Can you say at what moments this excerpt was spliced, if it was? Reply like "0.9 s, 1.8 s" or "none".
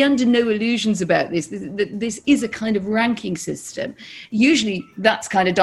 none